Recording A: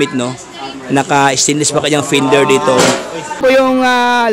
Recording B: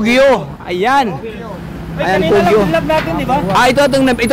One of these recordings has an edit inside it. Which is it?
A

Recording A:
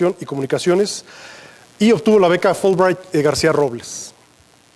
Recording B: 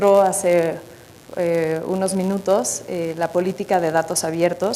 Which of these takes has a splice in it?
A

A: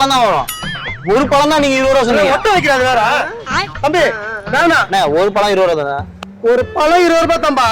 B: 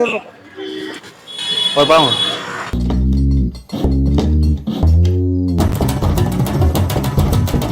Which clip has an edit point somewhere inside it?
B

